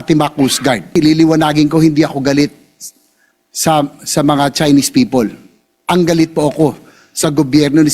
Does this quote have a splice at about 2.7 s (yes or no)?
no